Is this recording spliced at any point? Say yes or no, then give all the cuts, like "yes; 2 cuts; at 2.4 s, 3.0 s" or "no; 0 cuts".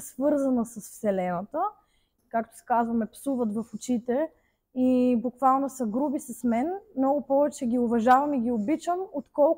yes; 1 cut; at 2.1 s